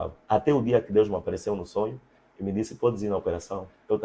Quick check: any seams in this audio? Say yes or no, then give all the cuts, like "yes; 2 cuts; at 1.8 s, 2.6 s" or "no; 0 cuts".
no; 0 cuts